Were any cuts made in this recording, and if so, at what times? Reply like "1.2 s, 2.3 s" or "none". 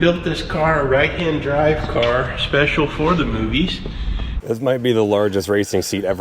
4.3 s